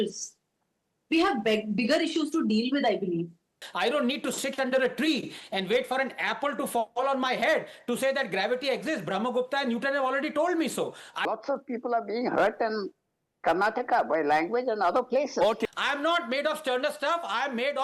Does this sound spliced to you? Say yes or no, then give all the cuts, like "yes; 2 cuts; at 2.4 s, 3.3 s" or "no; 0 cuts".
yes; 3 cuts; at 3.6 s, 11.2 s, 15.7 s